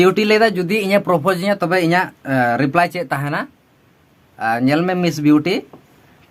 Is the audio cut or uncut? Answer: uncut